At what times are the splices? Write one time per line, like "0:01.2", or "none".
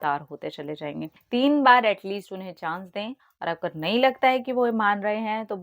0:01.1